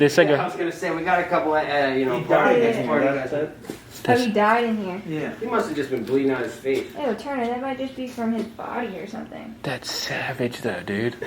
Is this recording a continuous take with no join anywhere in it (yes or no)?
yes